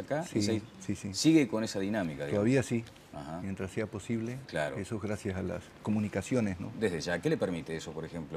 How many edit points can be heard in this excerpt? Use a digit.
1